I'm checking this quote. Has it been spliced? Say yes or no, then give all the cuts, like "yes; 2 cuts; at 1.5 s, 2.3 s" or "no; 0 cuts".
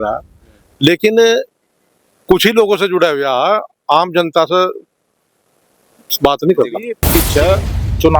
yes; 1 cut; at 6.9 s